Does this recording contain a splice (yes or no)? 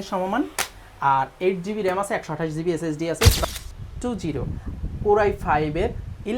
yes